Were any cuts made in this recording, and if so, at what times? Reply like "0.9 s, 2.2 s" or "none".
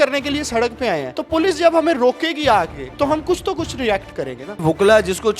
1.1 s, 2.8 s, 4.6 s